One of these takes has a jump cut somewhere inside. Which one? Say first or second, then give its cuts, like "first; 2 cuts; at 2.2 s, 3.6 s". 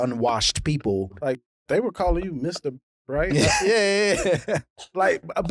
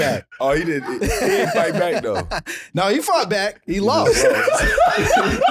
first; 2 cuts; at 1.2 s, 3.6 s